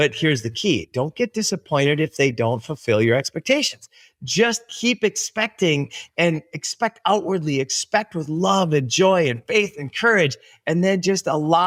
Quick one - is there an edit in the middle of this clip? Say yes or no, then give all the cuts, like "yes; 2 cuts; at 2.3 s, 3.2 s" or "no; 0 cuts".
no; 0 cuts